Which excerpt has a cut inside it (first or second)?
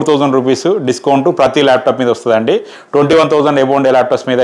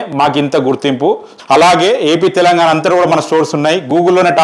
second